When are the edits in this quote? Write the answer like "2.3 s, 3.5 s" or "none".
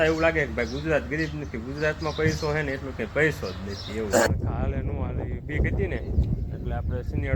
4.3 s